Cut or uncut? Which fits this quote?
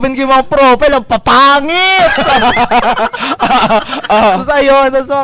uncut